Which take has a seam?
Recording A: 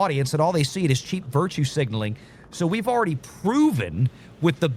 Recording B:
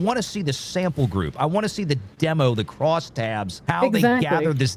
B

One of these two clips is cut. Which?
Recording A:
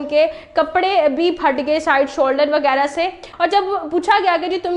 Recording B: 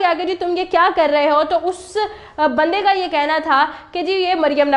A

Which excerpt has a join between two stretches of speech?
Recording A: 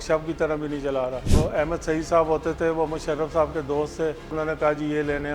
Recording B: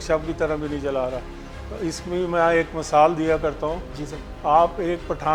A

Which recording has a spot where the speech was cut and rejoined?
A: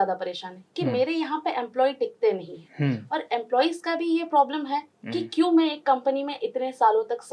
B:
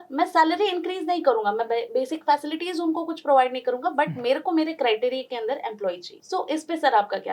B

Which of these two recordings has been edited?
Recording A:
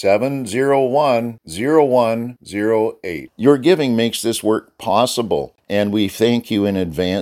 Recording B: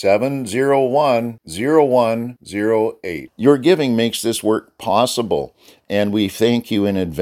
A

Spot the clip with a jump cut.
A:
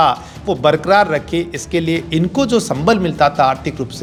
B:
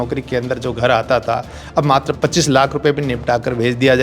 B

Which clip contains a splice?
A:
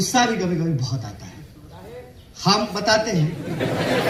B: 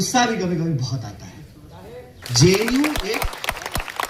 B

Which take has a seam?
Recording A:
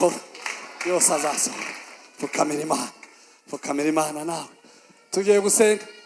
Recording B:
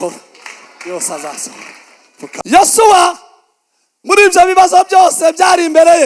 B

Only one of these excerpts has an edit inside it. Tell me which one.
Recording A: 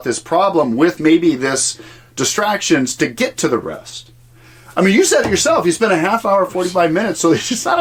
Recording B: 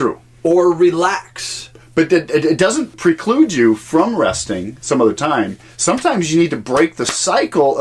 B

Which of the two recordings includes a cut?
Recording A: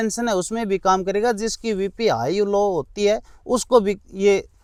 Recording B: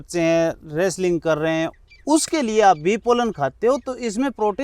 B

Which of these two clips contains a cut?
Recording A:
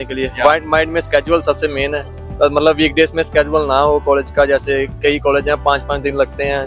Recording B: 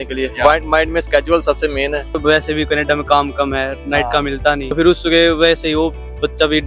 B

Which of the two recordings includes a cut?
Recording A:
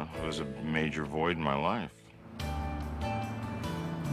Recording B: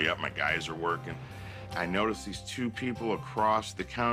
A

